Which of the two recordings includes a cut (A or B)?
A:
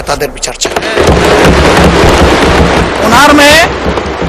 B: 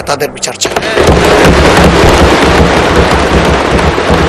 A